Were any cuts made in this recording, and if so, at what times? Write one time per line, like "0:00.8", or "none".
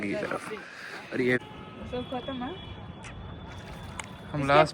0:01.4